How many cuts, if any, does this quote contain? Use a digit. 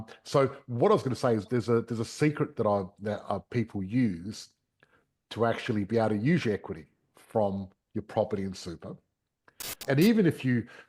1